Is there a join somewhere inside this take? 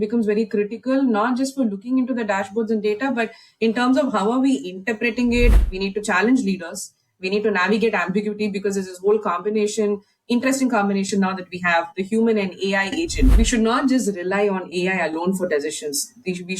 yes; 2 cuts; at 5.6 s, 13.3 s

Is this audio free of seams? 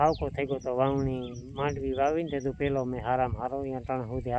yes; 0 cuts

